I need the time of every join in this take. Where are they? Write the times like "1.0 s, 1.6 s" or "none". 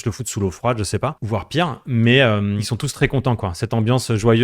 1.2 s, 2.6 s

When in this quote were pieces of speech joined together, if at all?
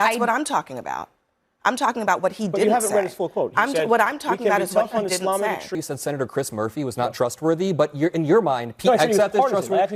5.7 s

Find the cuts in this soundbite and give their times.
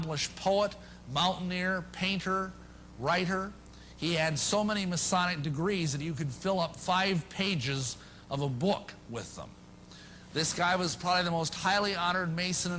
7.0 s

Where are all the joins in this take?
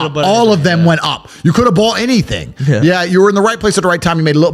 none

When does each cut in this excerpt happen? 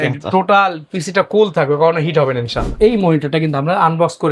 2.7 s

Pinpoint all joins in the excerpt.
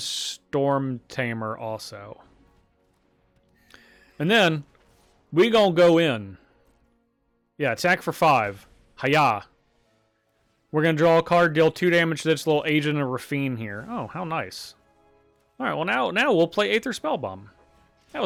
none

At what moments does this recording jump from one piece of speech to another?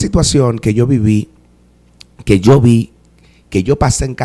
none

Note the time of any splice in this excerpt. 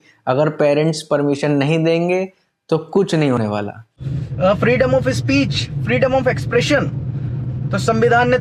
4.0 s

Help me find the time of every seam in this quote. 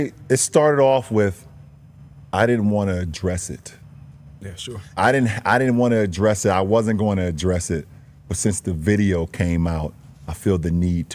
none

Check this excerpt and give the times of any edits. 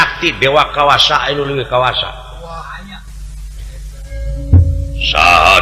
4.1 s

